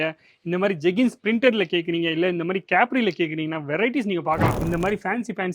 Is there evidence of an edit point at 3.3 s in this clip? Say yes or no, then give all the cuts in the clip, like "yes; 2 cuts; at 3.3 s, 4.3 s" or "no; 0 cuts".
no; 1 cut; at 4.6 s